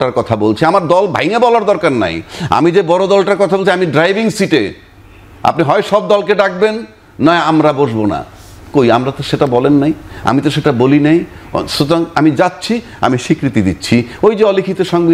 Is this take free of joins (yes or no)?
yes